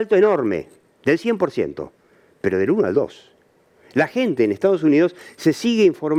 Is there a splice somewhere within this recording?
no; 0 cuts

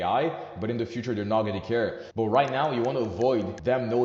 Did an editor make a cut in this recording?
yes; 1 cut; at 2.5 s

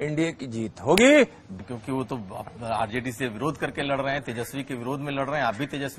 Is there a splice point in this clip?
yes; 1 cut; at 1.5 s

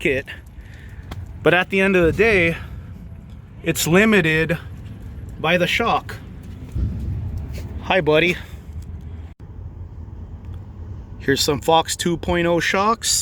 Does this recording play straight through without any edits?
no; 1 cut; at 9.4 s

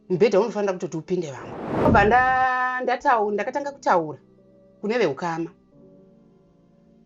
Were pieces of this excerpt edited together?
yes; 1 cut; at 1.9 s

